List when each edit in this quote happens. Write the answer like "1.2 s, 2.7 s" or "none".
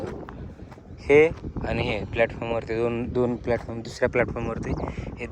none

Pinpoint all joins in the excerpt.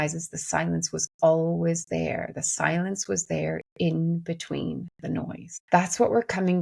5.5 s

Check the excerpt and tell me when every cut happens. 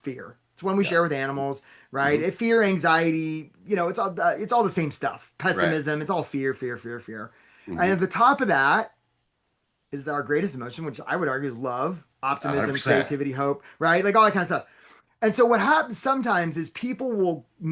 none

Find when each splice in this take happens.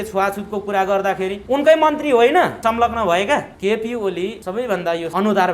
1.4 s, 2.6 s, 3.5 s, 4.5 s

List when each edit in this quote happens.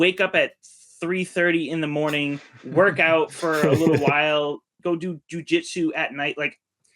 4.7 s

